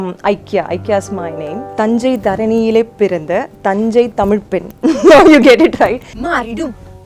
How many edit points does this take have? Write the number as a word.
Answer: two